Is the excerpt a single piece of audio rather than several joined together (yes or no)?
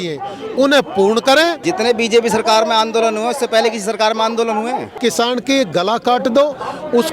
no